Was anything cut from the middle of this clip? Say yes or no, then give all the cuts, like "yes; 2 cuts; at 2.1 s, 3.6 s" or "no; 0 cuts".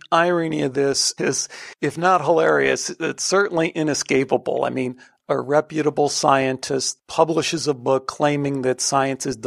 yes; 2 cuts; at 1.1 s, 6.9 s